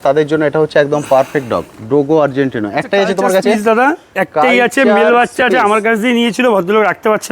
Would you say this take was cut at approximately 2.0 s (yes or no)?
no